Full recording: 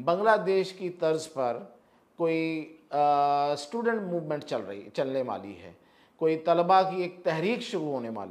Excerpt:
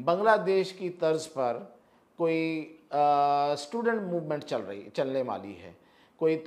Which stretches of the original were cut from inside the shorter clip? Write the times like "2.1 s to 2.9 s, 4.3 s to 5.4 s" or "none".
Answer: none